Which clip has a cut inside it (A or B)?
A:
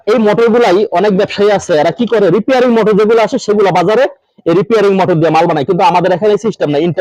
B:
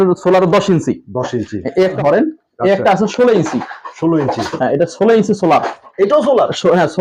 B